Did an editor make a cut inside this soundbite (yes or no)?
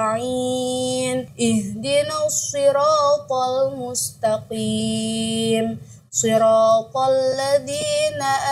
no